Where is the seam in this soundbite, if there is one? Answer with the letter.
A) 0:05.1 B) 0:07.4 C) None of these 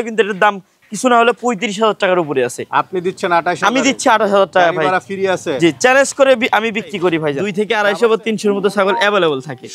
B